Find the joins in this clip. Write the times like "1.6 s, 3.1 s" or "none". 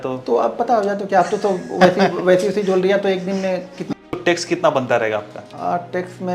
3.9 s, 5.4 s